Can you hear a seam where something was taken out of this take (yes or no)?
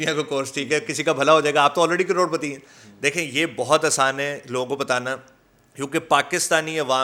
no